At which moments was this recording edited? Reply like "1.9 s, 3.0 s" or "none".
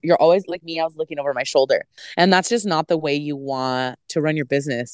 2.0 s